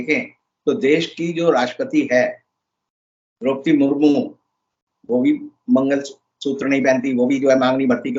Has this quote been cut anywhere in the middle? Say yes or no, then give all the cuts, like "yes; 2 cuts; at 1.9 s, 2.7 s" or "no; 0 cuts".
no; 0 cuts